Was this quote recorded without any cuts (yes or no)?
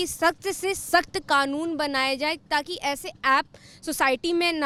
yes